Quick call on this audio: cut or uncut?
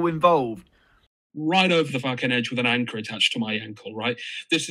cut